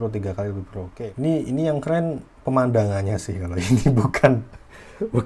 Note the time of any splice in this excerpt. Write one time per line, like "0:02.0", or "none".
0:00.9